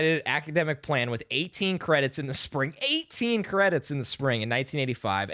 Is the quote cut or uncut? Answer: uncut